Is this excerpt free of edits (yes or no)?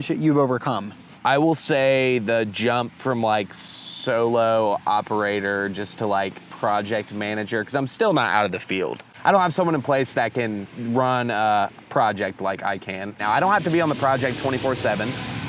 no